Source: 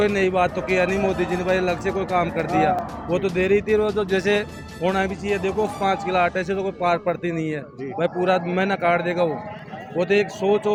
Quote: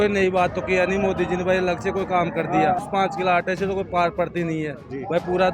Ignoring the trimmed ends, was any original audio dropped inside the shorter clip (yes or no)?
yes